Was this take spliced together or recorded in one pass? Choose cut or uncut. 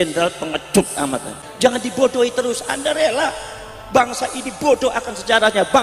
cut